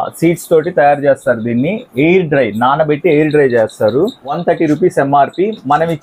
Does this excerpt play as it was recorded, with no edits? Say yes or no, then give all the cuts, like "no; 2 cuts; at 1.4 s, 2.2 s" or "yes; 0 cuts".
yes; 0 cuts